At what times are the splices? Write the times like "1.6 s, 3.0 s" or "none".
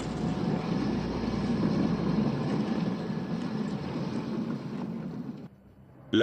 1.0 s